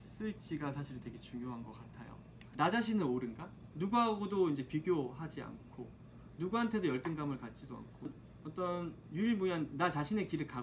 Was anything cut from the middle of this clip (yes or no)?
yes